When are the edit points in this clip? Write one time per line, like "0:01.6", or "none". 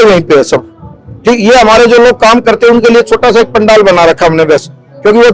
none